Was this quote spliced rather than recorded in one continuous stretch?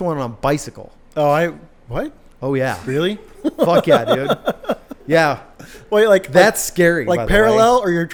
no; 0 cuts

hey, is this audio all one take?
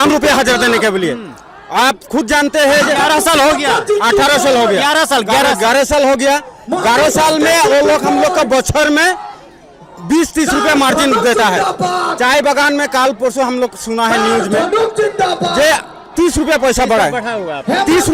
yes; 0 cuts

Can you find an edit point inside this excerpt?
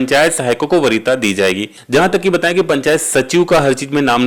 yes; 1 cut; at 1.7 s

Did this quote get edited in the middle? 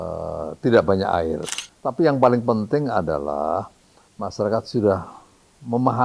yes; 1 cut; at 1.5 s

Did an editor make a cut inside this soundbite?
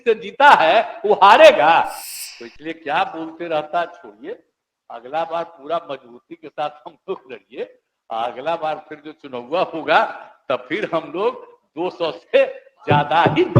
yes; 1 cut; at 2.0 s

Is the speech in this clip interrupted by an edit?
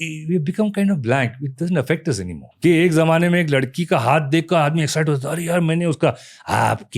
yes; 1 cut; at 2.4 s

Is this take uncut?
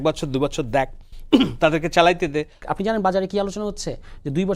no; 1 cut; at 2.6 s

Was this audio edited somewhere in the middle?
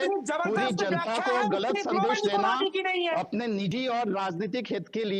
no; 0 cuts

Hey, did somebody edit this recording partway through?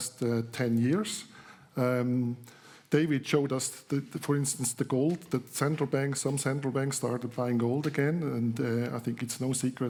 no; 0 cuts

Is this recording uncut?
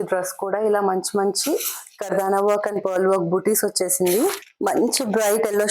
no; 1 cut; at 4.5 s

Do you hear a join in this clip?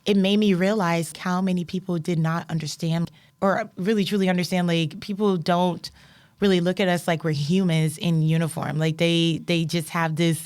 yes; 2 cuts; at 1.1 s, 3.1 s

